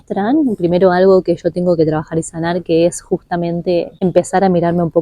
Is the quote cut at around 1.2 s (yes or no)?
no